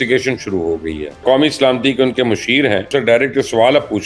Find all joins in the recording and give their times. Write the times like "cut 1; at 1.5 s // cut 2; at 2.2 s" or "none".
cut 1; at 1.2 s // cut 2; at 2.9 s